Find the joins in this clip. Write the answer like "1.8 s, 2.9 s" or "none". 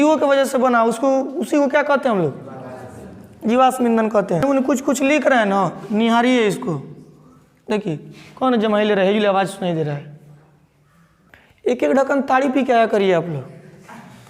4.4 s, 11.3 s